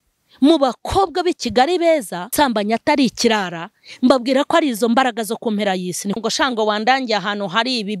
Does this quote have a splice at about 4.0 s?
no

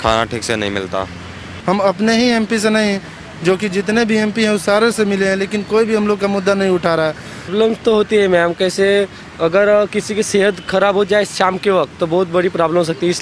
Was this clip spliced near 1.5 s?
yes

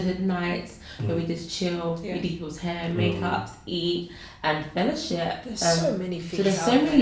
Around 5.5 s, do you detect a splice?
no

